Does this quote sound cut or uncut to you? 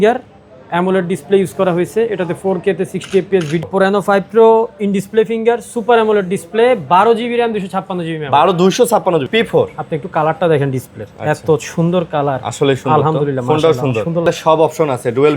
cut